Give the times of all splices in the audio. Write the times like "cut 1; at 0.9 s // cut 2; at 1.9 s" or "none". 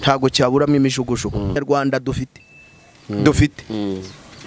cut 1; at 1.6 s